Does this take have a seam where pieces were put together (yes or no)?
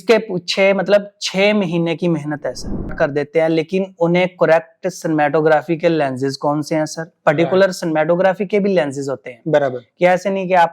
yes